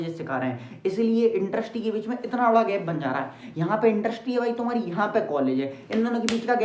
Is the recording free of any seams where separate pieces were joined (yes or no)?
yes